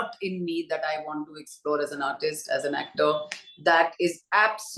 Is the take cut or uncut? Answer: uncut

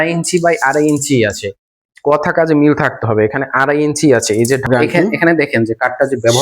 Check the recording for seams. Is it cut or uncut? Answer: cut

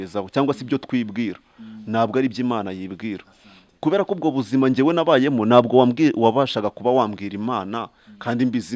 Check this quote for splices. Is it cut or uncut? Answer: uncut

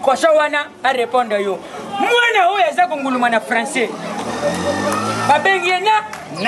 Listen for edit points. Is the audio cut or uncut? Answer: uncut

